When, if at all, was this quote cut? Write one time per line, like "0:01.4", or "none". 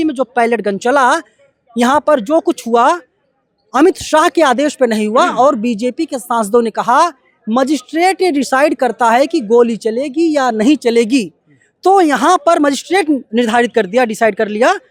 none